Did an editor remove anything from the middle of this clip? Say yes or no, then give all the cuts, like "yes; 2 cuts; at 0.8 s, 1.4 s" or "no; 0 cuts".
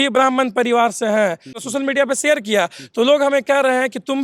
yes; 1 cut; at 1.6 s